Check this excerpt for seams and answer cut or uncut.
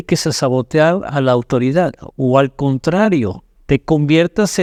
uncut